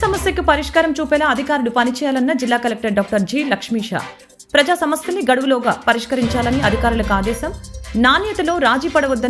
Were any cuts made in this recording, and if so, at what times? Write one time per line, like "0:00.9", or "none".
none